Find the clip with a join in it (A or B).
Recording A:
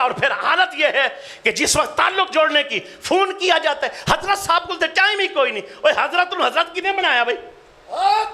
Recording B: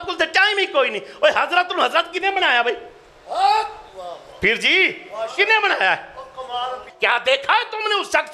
B